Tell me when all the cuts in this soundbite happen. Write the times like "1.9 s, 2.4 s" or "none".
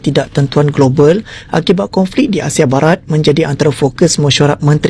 none